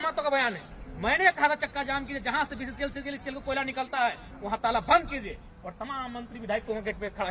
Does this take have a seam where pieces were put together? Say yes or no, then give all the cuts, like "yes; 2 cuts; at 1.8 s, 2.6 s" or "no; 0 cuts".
no; 0 cuts